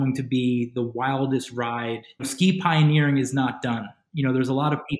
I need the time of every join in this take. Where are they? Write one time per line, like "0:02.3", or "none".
0:02.2

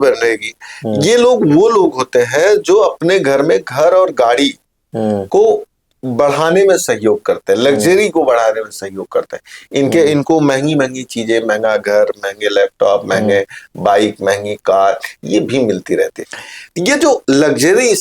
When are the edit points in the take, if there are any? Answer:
0:16.2

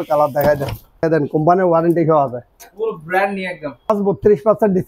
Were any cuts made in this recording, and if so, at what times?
0:01.0
0:03.9

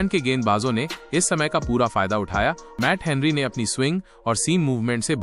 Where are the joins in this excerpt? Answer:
0:02.7

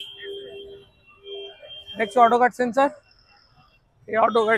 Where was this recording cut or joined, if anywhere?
none

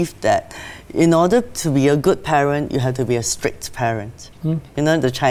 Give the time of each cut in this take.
none

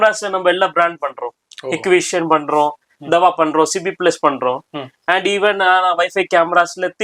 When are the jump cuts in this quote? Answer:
none

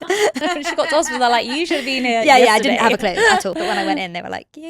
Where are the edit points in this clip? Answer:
0:03.5

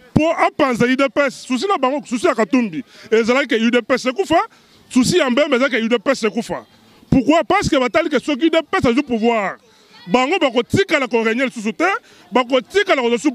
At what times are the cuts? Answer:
none

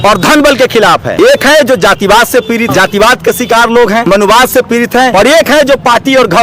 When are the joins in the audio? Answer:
0:01.1
0:02.7
0:04.0
0:05.1

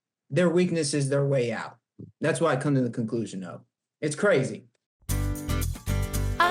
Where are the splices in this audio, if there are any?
0:04.8

